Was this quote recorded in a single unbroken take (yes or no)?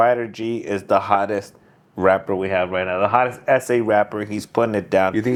yes